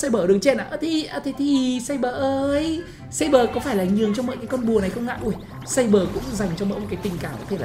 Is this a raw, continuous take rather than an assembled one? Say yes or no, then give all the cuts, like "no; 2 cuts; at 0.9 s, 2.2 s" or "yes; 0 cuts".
yes; 0 cuts